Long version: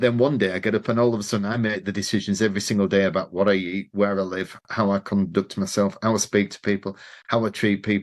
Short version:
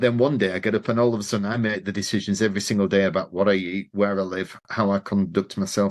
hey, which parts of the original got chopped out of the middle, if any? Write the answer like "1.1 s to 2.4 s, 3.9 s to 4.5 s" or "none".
none